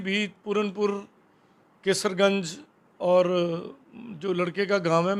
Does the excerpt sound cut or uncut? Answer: uncut